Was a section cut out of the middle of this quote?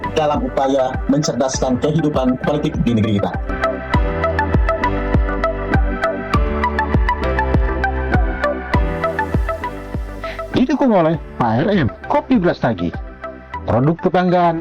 no; 0 cuts

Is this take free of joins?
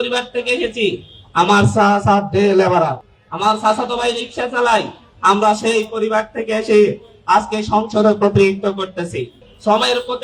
yes; 0 cuts

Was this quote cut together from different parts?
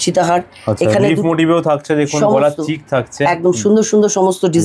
no; 0 cuts

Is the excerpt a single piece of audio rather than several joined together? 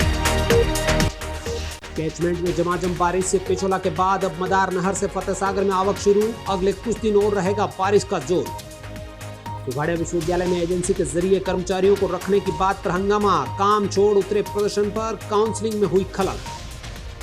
no; 1 cut; at 1.0 s

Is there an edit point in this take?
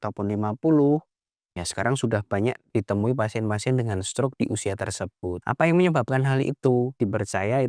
yes; 3 cuts; at 2.7 s, 5.4 s, 6.9 s

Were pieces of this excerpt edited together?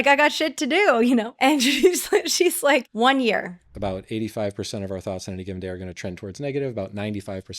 yes; 3 cuts; at 1.3 s, 2.9 s, 3.7 s

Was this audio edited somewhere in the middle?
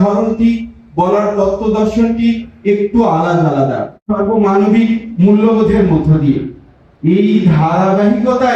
yes; 1 cut; at 4.0 s

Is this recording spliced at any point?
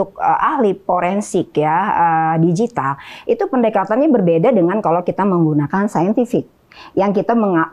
no; 0 cuts

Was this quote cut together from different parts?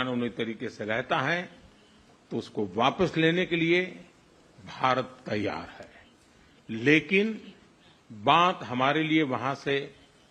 no; 0 cuts

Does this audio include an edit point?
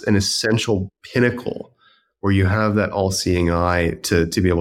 yes; 1 cut; at 1.0 s

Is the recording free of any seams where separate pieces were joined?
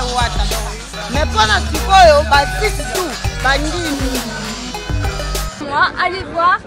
no; 1 cut; at 5.6 s

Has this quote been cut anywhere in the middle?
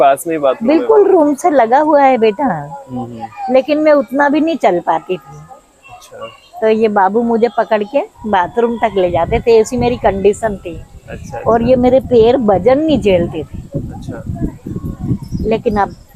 no; 0 cuts

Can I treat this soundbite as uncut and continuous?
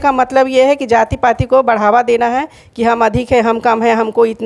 yes; 0 cuts

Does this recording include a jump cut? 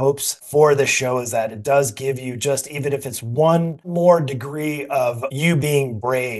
yes; 1 cut; at 3.9 s

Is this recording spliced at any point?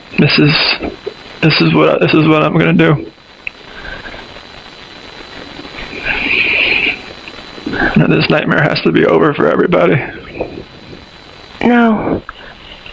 no; 0 cuts

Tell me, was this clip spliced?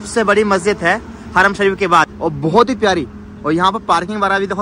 no; 0 cuts

